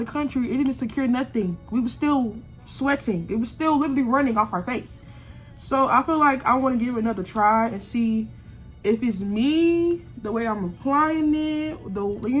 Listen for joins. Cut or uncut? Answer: uncut